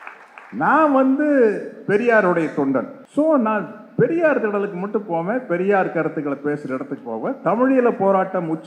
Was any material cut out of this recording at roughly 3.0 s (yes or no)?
yes